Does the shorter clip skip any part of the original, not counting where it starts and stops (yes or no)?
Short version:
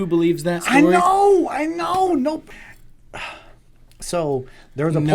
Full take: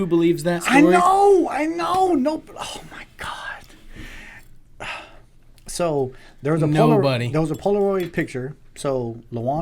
yes